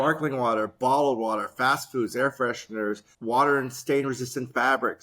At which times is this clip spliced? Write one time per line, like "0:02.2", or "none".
0:03.1